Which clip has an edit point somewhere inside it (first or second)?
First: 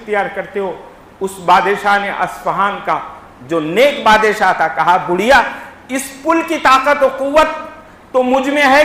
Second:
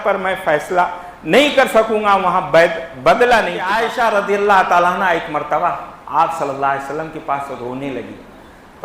second